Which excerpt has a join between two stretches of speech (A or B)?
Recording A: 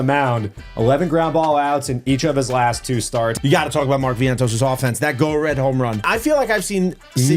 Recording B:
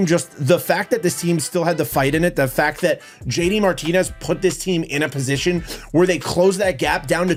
A